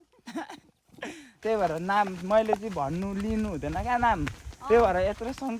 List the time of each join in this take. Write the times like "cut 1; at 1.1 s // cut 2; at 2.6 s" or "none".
cut 1; at 1.4 s